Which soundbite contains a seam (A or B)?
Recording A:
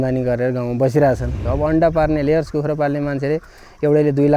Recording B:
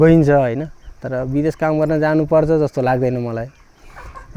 A